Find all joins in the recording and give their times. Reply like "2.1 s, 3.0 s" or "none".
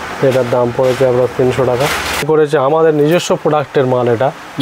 2.2 s